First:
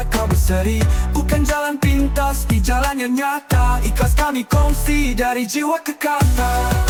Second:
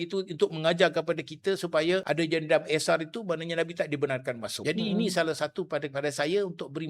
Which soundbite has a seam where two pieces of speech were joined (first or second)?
second